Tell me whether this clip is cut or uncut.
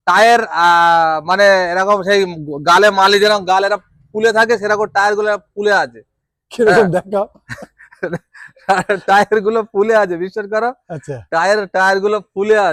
uncut